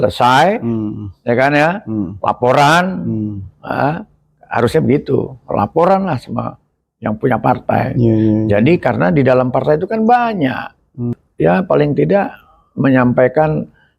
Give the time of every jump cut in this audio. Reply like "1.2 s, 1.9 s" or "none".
11.2 s